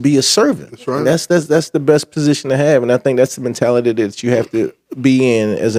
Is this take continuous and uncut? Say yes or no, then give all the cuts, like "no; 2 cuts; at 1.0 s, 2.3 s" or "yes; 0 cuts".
yes; 0 cuts